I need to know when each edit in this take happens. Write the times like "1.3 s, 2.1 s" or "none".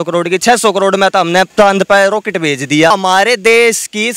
1.5 s, 2.9 s